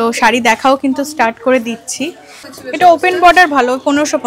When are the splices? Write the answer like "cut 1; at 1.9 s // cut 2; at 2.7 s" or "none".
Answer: cut 1; at 2.8 s